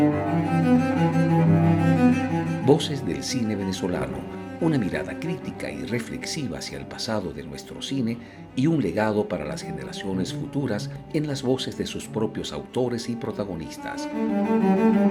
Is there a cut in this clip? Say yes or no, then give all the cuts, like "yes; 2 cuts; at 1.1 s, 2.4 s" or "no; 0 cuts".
no; 0 cuts